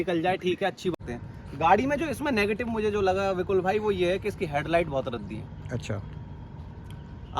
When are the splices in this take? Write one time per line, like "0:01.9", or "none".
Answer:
0:00.9